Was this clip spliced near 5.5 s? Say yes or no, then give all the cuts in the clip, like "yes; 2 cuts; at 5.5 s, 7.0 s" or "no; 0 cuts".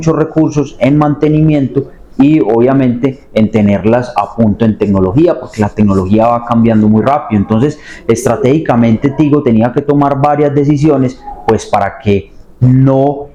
no; 0 cuts